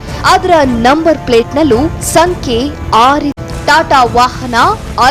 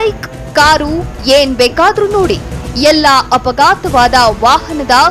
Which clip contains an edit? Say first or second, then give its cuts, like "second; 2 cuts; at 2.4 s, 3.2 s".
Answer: first; 1 cut; at 3.3 s